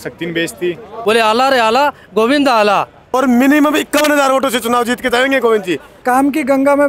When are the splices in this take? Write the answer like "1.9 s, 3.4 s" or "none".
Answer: 1.0 s, 3.1 s, 6.0 s

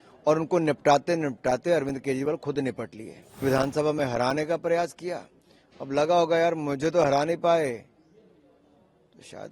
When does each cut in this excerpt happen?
3.4 s

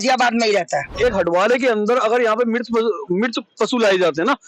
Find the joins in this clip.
0.9 s

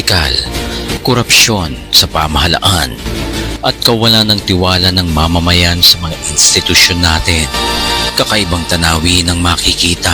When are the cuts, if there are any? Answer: 3.0 s

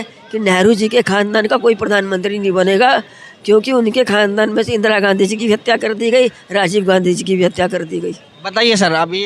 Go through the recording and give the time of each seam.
none

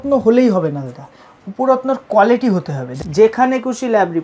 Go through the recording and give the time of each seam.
2.9 s

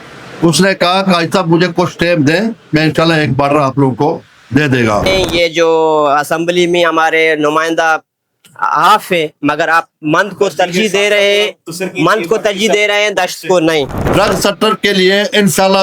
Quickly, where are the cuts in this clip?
5.1 s, 14.1 s

